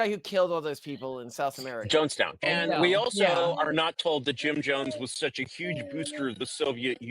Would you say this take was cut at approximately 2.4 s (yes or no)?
yes